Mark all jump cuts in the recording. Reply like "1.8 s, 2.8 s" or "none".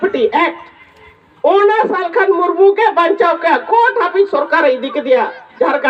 none